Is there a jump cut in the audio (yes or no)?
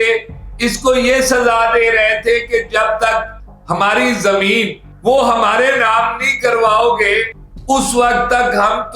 yes